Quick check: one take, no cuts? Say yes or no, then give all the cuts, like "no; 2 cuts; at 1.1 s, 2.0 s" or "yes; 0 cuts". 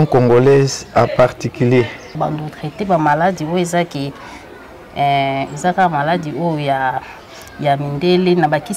no; 1 cut; at 2.1 s